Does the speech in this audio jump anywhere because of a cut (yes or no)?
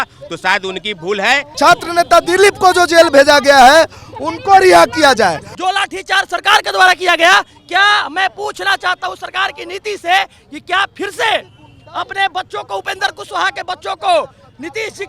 yes